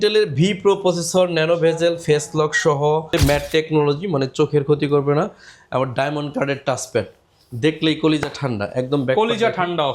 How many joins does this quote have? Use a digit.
1